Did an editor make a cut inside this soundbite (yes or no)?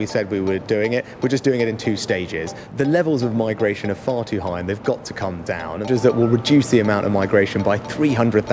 yes